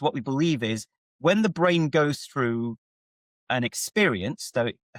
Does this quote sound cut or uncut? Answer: uncut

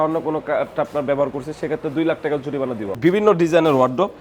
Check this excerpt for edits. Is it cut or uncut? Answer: cut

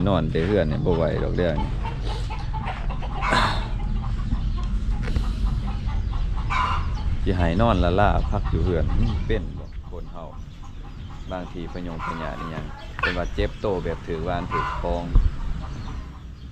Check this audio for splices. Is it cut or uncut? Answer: uncut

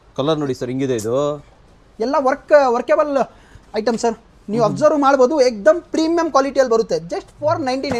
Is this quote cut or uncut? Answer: uncut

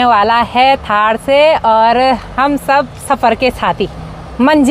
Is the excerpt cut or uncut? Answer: uncut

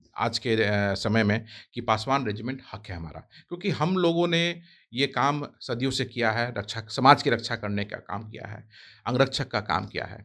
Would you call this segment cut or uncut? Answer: uncut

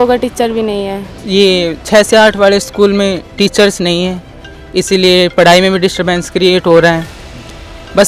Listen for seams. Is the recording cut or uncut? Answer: cut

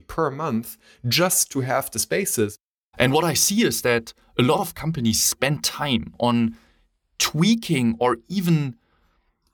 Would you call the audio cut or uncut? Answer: cut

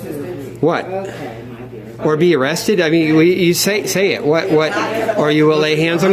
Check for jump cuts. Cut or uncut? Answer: uncut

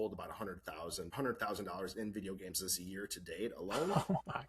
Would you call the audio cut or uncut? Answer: cut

